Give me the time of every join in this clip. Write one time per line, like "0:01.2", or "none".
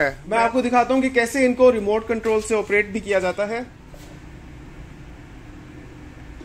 none